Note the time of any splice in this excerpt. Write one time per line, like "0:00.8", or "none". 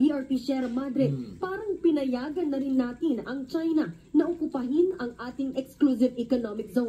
0:04.3

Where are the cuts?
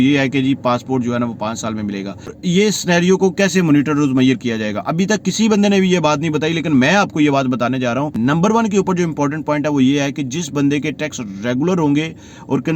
0:02.4
0:08.1

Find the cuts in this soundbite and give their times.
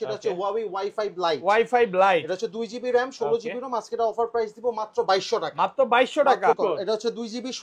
0:06.6

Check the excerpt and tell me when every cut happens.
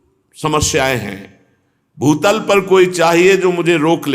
none

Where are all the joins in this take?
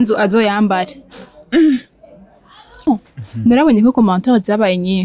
0:02.9

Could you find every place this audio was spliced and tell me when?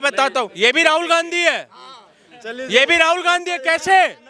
none

